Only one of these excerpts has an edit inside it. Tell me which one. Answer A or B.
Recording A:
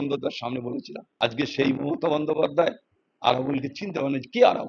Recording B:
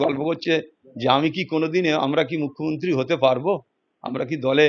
A